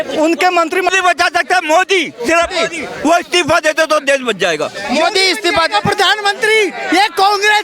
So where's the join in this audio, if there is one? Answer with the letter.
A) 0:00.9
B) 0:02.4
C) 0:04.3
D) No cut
A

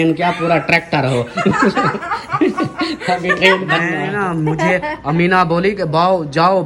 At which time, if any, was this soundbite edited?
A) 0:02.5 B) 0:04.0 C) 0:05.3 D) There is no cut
B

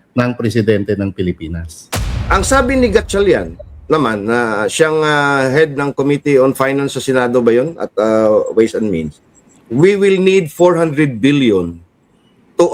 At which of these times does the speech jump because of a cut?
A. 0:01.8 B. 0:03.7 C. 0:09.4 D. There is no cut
A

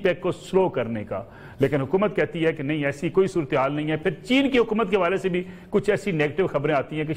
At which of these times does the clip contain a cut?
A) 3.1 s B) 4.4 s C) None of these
C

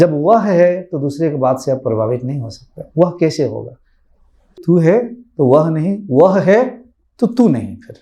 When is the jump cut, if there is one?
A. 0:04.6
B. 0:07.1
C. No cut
A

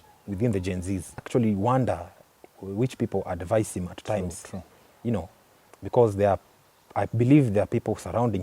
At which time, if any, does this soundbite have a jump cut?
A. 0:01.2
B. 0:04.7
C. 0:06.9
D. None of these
A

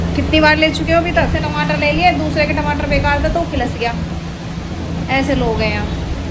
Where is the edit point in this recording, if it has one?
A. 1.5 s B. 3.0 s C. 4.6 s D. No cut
A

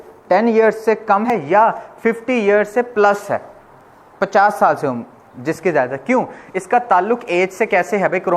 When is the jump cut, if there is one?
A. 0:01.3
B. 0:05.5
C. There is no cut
A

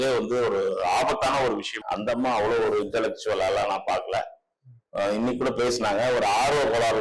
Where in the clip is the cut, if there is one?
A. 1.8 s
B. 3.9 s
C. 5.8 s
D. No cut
A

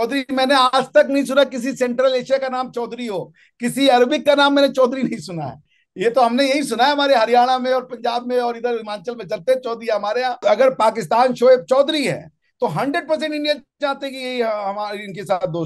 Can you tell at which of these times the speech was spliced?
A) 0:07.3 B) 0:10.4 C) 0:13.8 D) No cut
B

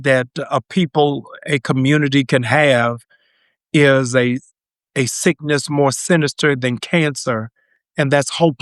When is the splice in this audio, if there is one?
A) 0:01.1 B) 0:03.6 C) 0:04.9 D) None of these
D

